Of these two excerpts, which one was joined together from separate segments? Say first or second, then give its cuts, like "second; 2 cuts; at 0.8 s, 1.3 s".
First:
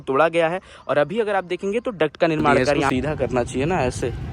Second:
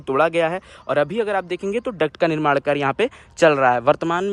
first; 1 cut; at 2.9 s